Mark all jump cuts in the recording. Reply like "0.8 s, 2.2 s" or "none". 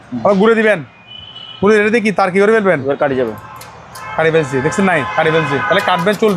none